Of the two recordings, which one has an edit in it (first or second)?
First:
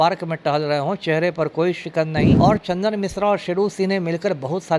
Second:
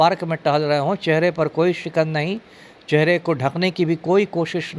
first